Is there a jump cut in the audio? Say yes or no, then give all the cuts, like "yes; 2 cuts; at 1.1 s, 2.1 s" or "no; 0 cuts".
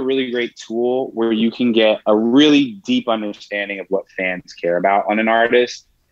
no; 0 cuts